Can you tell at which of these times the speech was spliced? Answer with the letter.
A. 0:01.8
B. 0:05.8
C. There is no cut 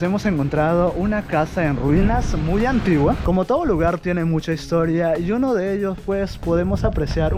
C